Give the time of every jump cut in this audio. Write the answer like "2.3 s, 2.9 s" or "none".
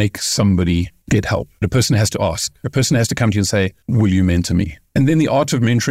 1.6 s, 3.8 s, 4.8 s